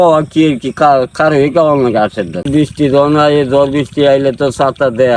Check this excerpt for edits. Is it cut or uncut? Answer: cut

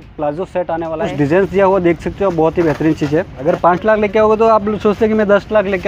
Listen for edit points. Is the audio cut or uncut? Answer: cut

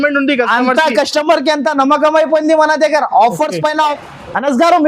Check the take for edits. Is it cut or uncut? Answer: cut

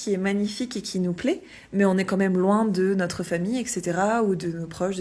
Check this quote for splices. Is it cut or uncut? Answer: uncut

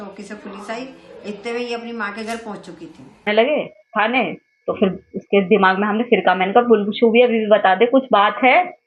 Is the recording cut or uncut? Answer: cut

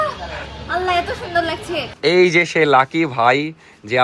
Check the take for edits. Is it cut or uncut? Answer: cut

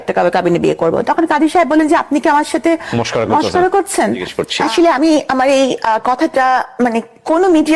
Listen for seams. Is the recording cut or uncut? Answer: cut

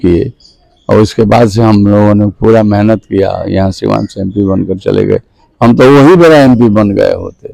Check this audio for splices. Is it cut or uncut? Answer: uncut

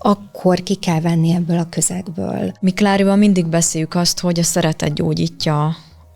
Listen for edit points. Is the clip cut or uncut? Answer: cut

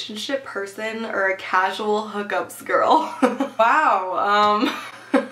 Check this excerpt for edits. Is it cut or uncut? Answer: uncut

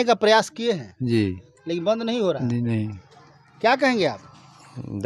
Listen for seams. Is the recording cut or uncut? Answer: uncut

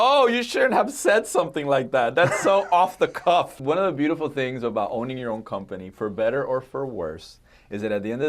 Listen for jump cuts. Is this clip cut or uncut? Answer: cut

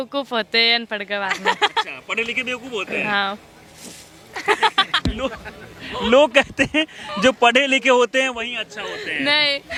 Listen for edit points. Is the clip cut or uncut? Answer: uncut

